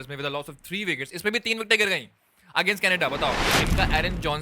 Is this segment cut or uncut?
cut